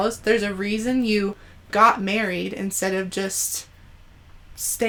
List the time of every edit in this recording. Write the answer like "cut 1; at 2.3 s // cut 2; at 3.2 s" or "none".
none